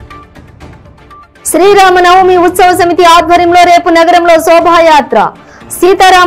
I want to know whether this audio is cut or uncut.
cut